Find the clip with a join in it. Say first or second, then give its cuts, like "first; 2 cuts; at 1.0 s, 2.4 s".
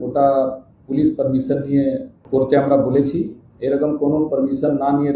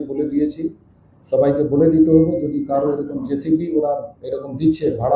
first; 1 cut; at 2.1 s